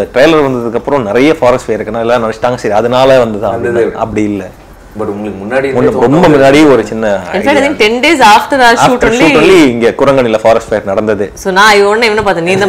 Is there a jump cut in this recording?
no; 0 cuts

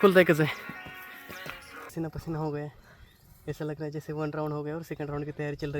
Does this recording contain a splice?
yes; 1 cut; at 1.9 s

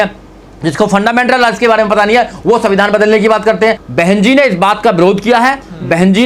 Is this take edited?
yes; 1 cut; at 3.8 s

